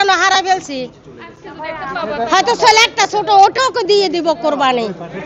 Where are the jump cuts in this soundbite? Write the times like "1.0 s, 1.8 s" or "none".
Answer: none